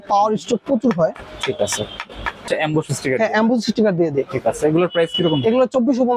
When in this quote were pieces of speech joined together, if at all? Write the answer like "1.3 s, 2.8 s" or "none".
2.5 s